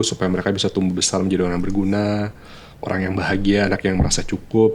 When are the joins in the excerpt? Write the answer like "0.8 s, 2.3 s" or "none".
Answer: none